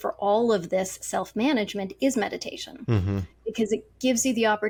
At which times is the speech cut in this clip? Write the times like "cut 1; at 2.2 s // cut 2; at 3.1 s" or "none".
none